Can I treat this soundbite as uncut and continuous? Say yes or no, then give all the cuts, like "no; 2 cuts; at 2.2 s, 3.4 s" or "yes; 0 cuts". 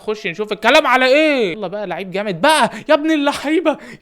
no; 1 cut; at 1.5 s